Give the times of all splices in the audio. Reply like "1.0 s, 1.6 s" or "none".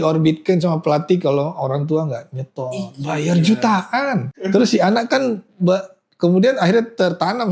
4.3 s